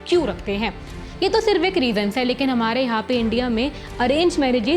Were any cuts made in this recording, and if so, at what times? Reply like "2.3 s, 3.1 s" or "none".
0.9 s